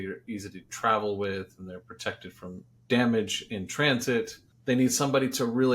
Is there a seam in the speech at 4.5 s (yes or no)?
yes